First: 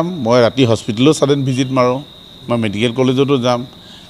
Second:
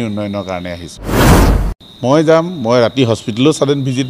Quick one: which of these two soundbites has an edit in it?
second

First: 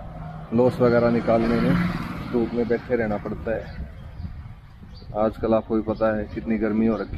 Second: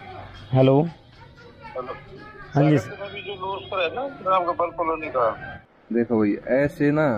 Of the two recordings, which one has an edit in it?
second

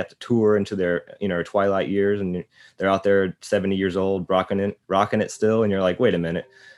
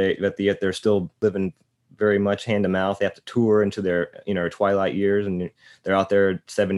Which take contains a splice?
second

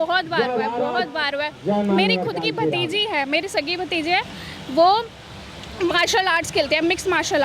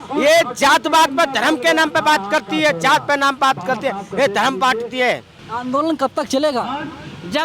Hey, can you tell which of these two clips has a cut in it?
second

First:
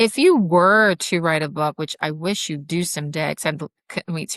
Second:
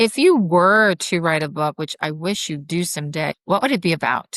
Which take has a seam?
second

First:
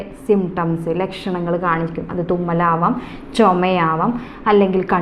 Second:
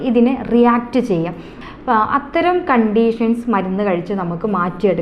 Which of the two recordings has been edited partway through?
second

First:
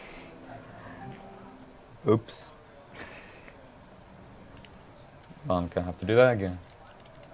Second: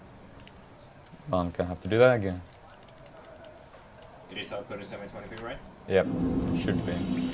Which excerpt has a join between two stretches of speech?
first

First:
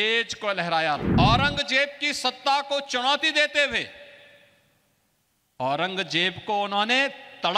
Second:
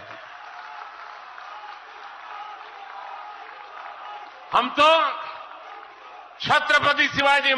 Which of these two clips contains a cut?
first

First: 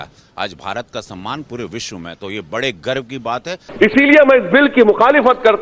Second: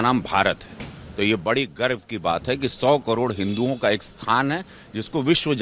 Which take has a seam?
first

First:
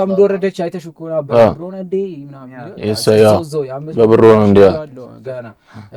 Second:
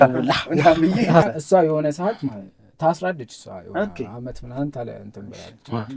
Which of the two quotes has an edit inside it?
second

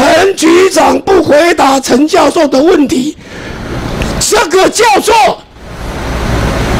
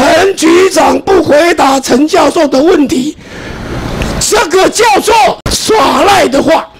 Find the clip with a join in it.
second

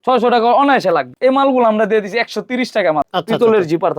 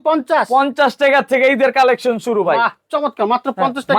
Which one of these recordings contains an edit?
first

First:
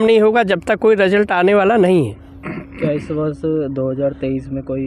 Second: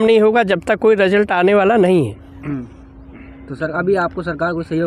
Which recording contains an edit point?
second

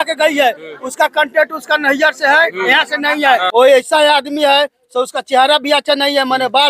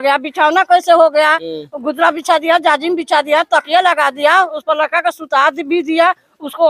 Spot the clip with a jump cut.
first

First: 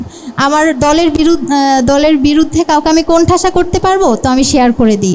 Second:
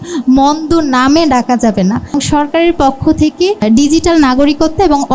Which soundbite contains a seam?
second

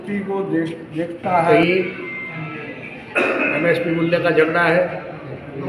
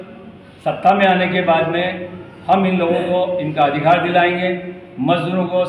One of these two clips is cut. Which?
first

